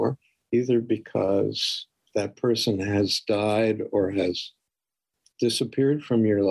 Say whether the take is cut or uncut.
uncut